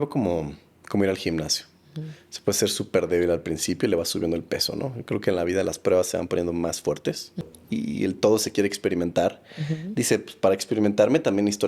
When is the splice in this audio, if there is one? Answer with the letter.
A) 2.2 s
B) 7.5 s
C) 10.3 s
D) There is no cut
B